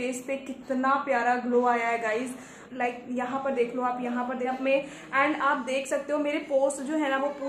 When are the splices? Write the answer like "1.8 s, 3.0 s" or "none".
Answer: 2.6 s, 4.5 s